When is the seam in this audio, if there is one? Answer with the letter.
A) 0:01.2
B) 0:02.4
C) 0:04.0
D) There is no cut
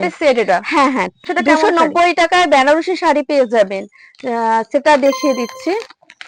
A